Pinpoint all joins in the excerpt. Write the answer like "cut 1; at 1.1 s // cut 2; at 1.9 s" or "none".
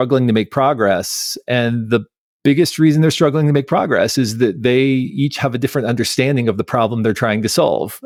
none